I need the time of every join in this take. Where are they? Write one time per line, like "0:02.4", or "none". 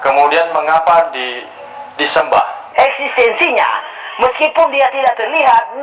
0:02.6